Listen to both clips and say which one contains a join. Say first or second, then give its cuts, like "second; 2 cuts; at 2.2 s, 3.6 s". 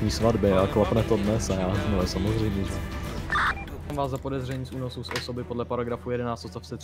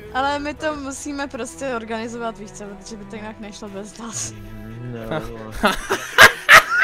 first; 1 cut; at 3.9 s